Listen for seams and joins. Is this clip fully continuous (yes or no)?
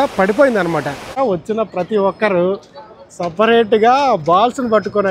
no